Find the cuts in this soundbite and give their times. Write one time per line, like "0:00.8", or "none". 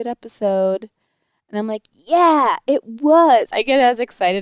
0:03.5